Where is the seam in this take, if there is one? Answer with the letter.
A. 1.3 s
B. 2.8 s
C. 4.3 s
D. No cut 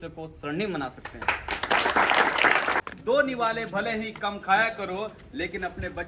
B